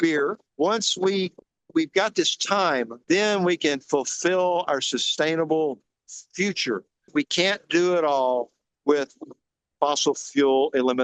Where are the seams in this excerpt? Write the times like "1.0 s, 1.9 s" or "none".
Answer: 7.1 s